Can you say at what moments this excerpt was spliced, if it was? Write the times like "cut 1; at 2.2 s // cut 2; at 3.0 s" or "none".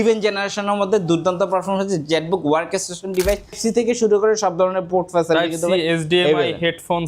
cut 1; at 3.6 s